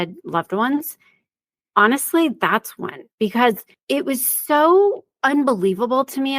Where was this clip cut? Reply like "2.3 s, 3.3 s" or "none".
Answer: 3.7 s, 5.1 s